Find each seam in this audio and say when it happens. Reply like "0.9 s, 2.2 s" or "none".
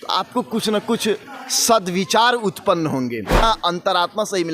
3.4 s